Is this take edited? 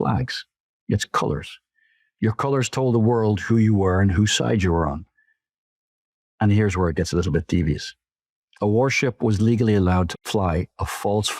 yes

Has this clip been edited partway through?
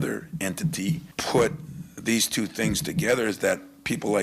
yes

